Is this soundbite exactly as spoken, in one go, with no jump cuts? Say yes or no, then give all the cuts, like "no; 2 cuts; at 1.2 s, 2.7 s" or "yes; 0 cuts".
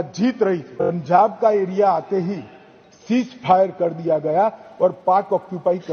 no; 1 cut; at 1.0 s